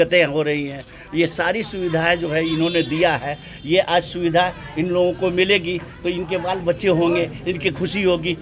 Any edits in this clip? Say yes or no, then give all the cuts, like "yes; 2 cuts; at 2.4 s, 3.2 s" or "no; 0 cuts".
no; 0 cuts